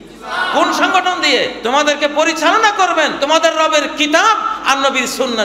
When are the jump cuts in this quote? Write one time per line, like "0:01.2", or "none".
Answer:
0:01.5
0:03.2